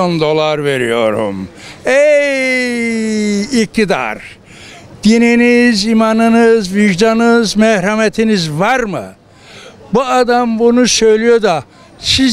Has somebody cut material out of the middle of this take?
no; 0 cuts

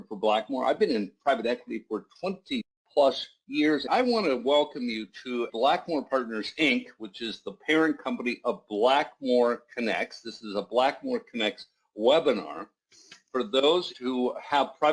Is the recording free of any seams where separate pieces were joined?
no; 2 cuts; at 2.8 s, 3.8 s

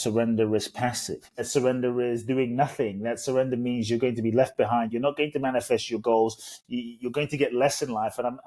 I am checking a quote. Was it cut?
yes; 2 cuts; at 1.5 s, 4.9 s

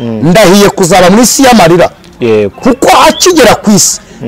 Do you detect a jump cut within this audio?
no; 0 cuts

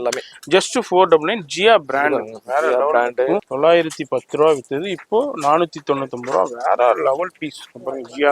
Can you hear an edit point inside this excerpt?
yes; 1 cut; at 3.5 s

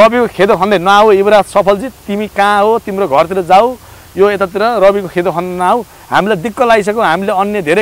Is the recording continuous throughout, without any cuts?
yes; 0 cuts

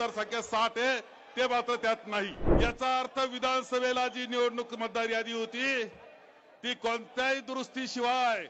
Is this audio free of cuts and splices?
no; 1 cut; at 2.4 s

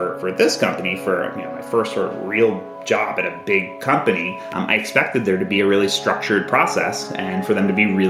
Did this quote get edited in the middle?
no; 0 cuts

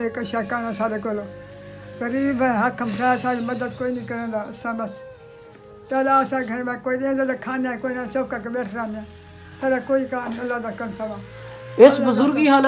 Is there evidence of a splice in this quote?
no; 0 cuts

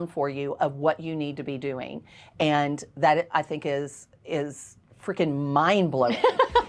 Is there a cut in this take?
no; 0 cuts

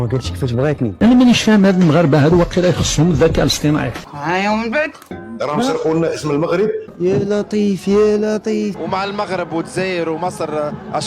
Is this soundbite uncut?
no; 4 cuts; at 0.9 s, 4.0 s, 5.2 s, 8.8 s

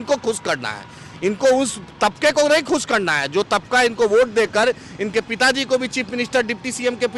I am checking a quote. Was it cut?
no; 0 cuts

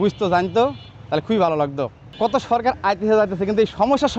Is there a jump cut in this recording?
yes; 1 cut; at 2.0 s

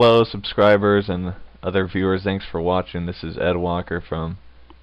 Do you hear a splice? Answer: no; 0 cuts

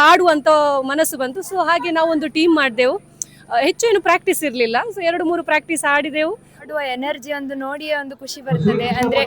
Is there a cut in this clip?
yes; 1 cut; at 6.6 s

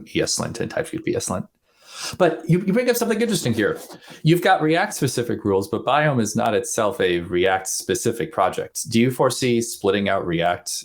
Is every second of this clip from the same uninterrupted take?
yes; 0 cuts

